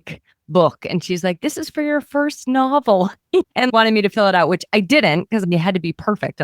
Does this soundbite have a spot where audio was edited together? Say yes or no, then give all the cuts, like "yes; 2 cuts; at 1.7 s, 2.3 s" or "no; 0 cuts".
yes; 2 cuts; at 3.5 s, 5.4 s